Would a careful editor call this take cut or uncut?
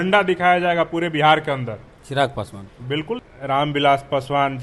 uncut